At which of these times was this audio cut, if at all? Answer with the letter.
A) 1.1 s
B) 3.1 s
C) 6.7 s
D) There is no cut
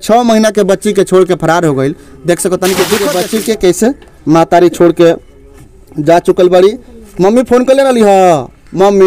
B